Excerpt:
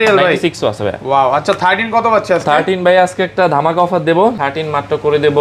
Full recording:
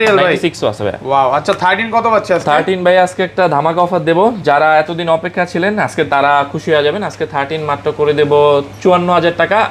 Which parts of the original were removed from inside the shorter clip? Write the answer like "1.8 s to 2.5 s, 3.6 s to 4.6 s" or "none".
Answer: 4.4 s to 7.3 s